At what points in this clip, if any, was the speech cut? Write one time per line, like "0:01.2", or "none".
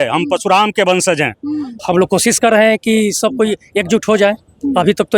0:01.7